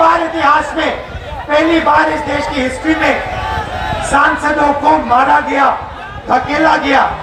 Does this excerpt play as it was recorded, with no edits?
yes; 0 cuts

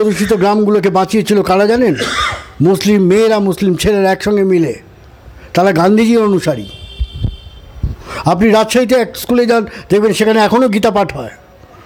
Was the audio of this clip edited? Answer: no; 0 cuts

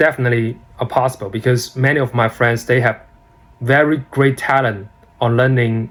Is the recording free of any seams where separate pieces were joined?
yes; 0 cuts

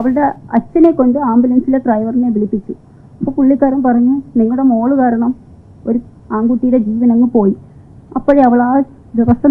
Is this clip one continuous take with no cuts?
yes; 0 cuts

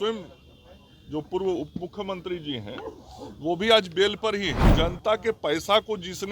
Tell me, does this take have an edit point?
yes; 1 cut; at 4.6 s

